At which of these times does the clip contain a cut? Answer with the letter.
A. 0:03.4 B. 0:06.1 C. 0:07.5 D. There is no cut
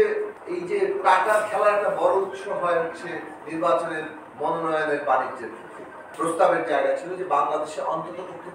B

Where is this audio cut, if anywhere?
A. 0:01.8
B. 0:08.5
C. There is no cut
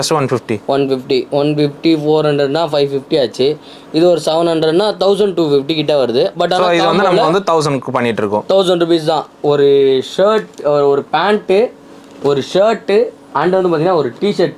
C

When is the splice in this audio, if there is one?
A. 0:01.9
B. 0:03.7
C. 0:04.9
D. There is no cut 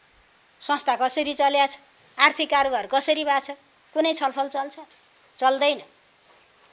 D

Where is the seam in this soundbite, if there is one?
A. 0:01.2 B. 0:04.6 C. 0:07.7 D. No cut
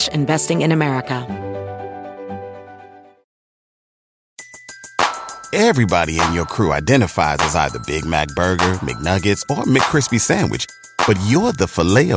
A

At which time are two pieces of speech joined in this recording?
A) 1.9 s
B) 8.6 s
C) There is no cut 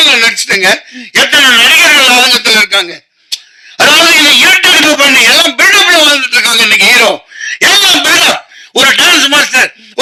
C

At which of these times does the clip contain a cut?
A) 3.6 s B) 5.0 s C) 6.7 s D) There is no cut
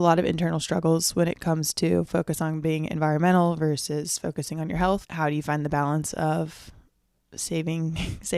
B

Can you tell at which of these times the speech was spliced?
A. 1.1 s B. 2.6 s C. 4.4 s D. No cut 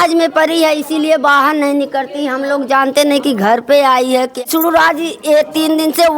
C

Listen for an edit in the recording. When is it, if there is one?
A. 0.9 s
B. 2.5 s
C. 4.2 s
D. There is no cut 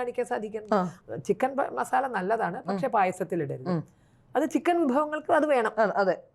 A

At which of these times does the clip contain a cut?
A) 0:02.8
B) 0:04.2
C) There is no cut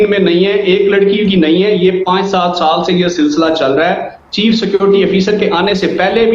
C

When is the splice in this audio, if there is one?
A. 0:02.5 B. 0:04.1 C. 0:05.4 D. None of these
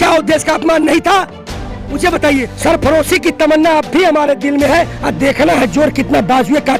A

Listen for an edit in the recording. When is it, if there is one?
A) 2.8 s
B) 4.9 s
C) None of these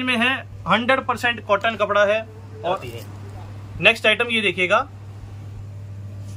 A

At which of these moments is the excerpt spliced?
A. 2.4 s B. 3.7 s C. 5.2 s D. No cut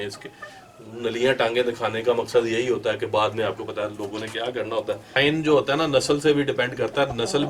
C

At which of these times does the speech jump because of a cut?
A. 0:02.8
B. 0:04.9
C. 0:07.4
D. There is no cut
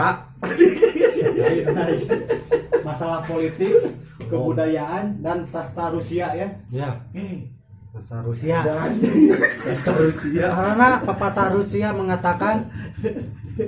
D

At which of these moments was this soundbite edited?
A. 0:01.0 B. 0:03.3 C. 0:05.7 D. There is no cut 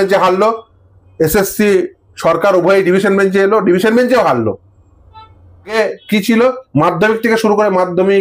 C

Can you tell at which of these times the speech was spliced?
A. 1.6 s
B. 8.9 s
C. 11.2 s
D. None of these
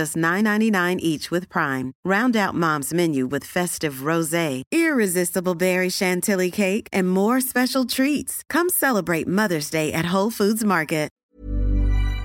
C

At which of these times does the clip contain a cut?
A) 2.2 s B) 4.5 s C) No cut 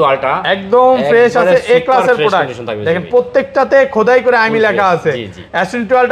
C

